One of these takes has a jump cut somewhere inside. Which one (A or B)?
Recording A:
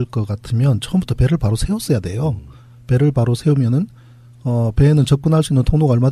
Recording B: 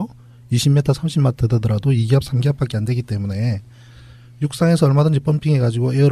B